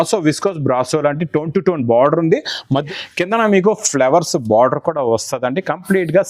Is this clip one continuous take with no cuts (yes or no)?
no